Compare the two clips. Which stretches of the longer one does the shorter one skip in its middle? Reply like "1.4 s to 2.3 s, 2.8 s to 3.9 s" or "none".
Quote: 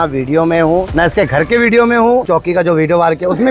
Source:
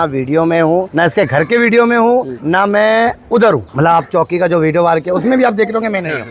2.2 s to 4.1 s